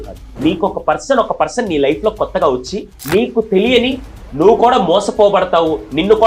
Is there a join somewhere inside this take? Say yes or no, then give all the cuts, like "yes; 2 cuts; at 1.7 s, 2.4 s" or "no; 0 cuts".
no; 0 cuts